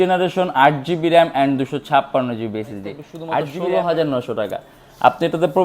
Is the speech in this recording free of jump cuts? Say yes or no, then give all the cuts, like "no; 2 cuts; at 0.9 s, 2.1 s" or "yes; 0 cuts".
no; 1 cut; at 3.5 s